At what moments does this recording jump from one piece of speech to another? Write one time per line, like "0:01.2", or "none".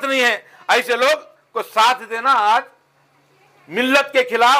none